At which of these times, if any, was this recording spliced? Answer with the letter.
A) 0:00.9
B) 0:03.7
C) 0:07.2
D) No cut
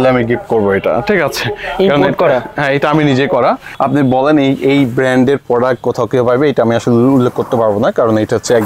B